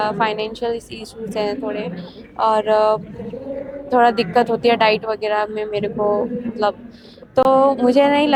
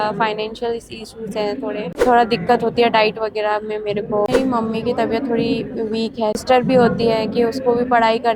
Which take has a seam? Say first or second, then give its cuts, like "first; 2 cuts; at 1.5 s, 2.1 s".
second; 3 cuts; at 1.9 s, 4.3 s, 6.4 s